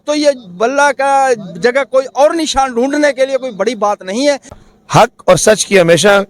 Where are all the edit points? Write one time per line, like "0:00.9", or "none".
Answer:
0:04.5

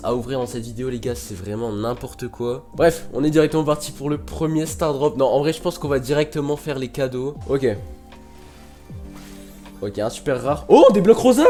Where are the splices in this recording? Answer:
none

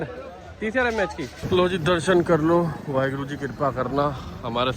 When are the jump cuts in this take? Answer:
0:01.4

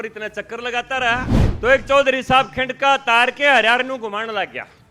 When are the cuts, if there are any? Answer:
0:01.4

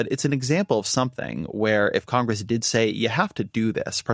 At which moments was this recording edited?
none

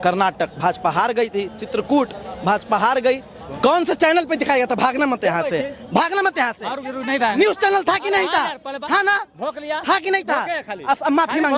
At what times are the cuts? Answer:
0:03.4

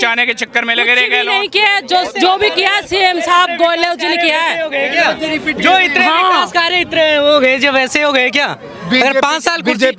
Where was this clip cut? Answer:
none

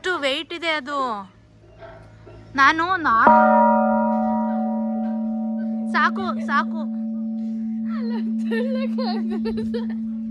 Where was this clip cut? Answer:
none

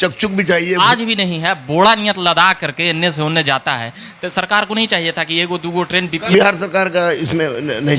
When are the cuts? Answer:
0:00.8
0:06.3

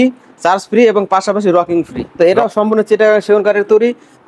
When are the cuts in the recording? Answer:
0:02.0

